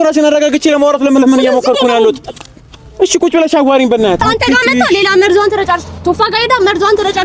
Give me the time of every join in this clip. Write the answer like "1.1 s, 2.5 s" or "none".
4.2 s

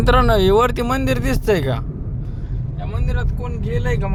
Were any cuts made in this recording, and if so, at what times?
none

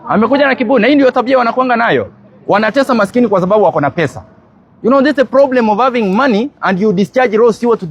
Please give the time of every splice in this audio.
none

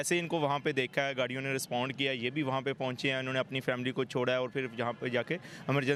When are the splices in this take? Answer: none

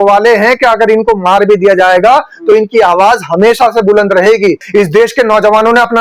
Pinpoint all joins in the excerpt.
4.6 s

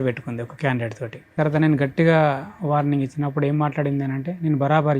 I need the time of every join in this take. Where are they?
1.3 s

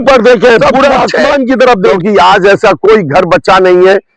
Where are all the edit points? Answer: 2.0 s

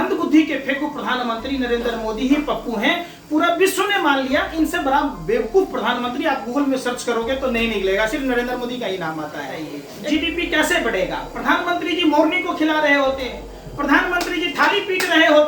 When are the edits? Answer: 9.8 s

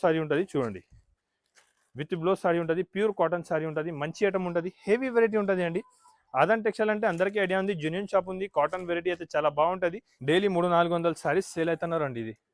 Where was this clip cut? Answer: 10.1 s

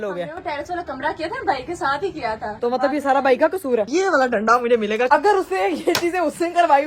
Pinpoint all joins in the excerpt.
2.5 s, 3.9 s, 5.1 s

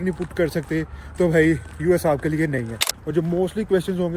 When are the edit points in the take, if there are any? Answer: 3.0 s

